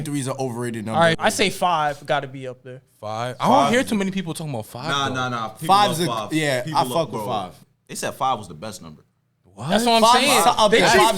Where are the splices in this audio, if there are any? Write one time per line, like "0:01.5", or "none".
0:01.2
0:07.6